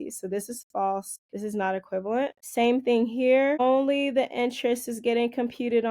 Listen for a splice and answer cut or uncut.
cut